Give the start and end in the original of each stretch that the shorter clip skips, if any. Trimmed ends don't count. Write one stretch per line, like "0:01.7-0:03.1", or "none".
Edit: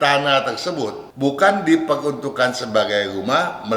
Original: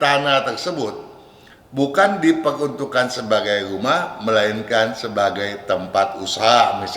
0:01.0-0:01.6